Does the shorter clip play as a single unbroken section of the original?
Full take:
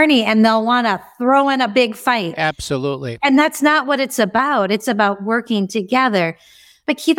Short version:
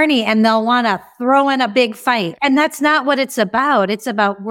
no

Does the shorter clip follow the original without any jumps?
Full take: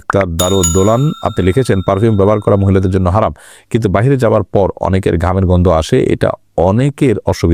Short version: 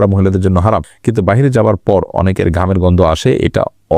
no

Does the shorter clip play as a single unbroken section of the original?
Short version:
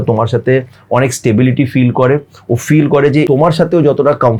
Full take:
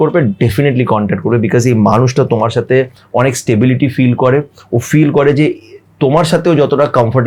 no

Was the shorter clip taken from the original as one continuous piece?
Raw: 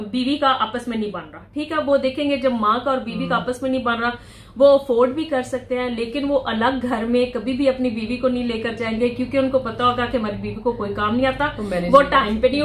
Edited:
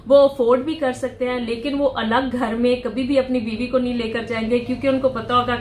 yes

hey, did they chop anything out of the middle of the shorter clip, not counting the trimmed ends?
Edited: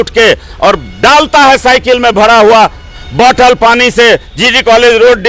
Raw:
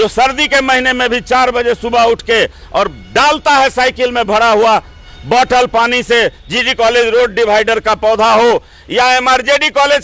no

